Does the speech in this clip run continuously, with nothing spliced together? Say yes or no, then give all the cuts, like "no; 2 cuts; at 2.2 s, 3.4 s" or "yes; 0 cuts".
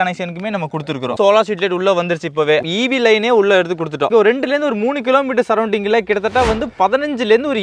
no; 3 cuts; at 1.1 s, 2.6 s, 4.1 s